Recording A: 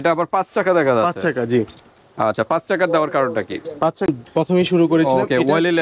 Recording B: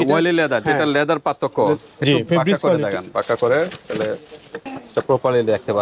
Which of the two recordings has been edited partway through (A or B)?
A